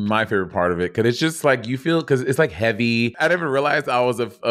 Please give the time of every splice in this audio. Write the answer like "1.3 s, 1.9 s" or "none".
3.1 s